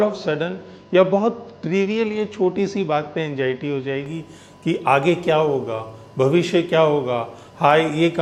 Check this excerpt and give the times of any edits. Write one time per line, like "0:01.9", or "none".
none

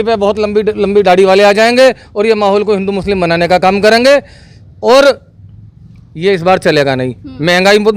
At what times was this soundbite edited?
none

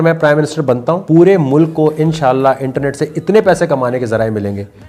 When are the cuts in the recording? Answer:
0:01.0

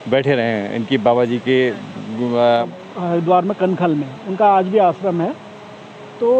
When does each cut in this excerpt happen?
0:02.7

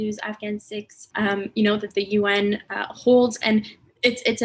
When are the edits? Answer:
0:01.0

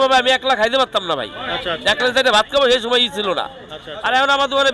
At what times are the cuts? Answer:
none

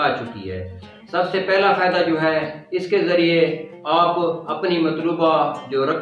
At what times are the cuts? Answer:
0:00.9

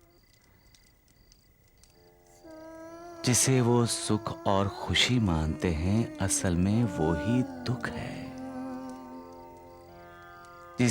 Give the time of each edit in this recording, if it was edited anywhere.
none

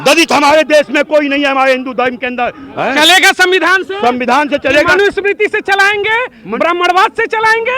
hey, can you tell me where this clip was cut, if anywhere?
0:02.6

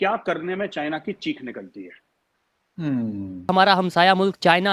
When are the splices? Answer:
0:03.3

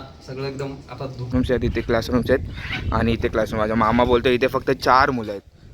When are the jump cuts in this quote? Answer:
0:01.3

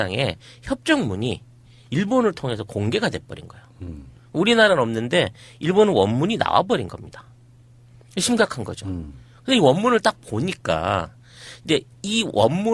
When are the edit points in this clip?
0:05.8

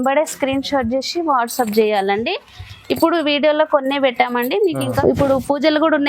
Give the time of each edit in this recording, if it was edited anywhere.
0:05.0

